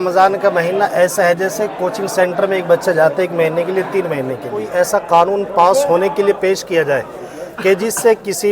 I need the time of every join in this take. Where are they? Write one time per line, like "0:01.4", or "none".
0:04.7